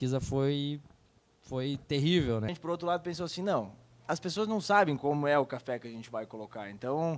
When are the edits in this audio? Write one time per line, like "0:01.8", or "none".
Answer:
0:02.6